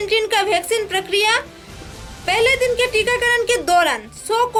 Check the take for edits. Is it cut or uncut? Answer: uncut